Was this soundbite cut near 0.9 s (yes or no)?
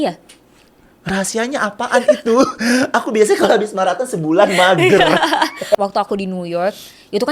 no